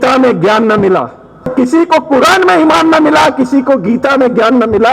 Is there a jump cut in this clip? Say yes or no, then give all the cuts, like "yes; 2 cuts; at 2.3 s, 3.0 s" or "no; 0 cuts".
yes; 1 cut; at 1.5 s